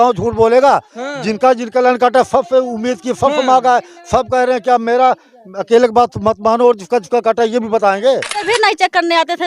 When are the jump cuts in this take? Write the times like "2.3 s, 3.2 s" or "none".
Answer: 8.3 s